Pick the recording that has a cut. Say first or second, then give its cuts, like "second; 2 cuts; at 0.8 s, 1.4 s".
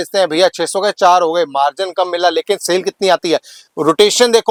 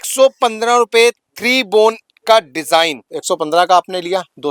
second; 1 cut; at 3.1 s